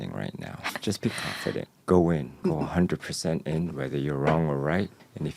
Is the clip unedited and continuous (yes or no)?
no